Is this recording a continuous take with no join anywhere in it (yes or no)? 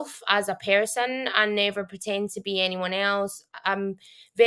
yes